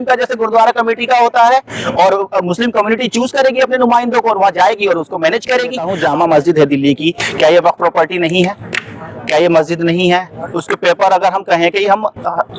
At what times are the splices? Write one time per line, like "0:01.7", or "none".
0:05.9